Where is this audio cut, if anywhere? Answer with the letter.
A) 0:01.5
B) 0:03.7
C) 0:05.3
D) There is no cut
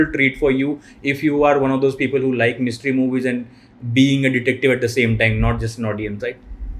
D